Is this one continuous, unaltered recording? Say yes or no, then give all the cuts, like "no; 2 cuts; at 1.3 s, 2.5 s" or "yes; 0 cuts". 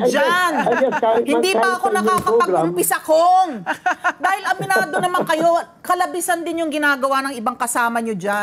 yes; 0 cuts